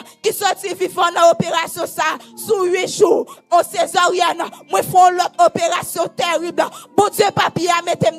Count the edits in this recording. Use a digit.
0